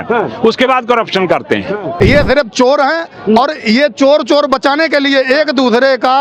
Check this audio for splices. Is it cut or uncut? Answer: cut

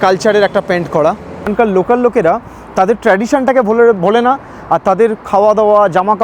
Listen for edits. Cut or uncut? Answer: cut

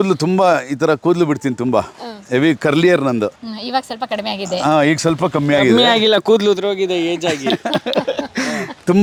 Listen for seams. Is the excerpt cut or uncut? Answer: uncut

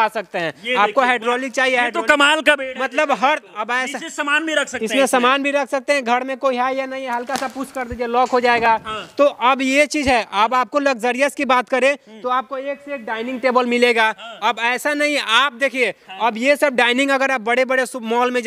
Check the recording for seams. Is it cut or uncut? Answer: uncut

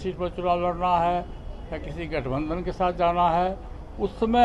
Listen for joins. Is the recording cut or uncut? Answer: uncut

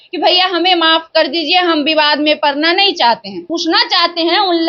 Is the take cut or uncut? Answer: cut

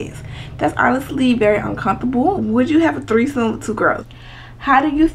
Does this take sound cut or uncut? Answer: cut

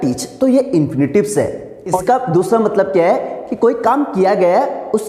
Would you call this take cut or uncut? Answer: cut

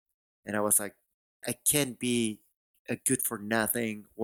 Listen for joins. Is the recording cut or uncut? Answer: cut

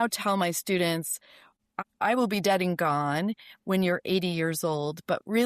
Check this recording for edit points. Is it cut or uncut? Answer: cut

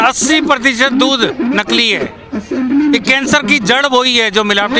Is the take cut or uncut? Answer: uncut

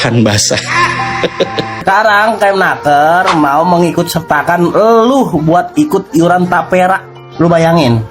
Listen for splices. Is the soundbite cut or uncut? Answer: cut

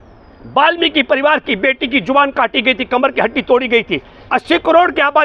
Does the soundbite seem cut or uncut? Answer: cut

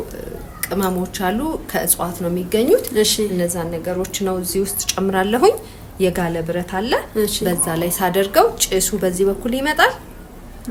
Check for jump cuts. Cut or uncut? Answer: uncut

